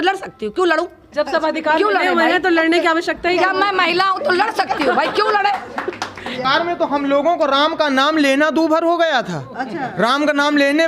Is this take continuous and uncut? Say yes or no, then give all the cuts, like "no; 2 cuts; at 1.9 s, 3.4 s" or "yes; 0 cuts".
no; 1 cut; at 6.5 s